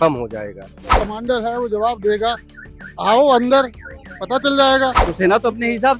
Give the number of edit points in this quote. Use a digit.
2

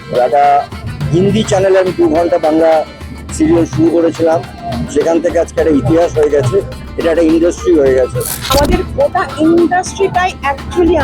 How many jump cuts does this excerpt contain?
1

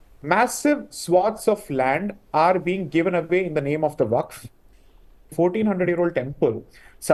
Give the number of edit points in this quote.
1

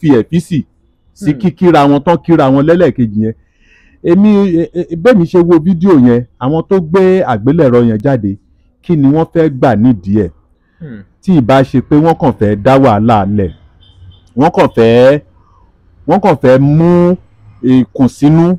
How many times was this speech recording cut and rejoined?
0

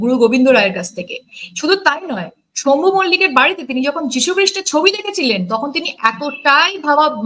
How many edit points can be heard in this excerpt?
0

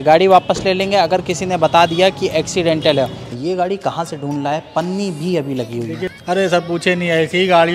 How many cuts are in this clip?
2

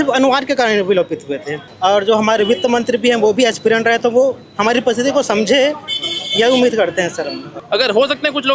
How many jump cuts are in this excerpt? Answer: 2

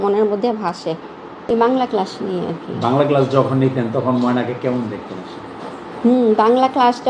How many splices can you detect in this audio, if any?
1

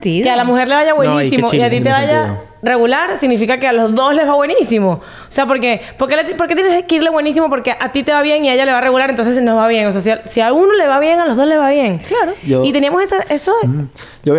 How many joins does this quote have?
0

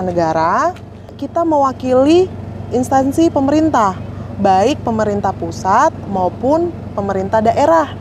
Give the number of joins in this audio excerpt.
1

